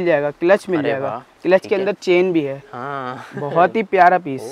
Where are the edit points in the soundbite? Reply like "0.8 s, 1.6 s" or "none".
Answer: none